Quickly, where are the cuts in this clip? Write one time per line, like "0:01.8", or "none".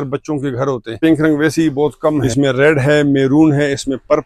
0:00.9
0:02.4